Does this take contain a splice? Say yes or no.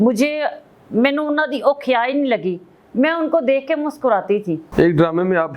yes